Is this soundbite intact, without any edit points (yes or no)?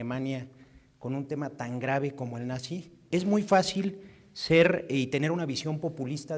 no